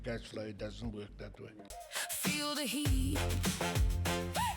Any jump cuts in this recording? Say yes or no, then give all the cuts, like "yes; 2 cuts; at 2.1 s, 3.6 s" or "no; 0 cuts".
yes; 1 cut; at 1.7 s